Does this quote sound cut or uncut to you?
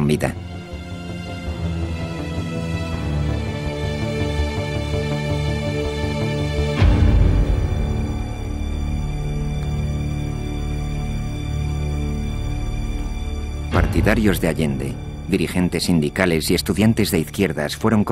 cut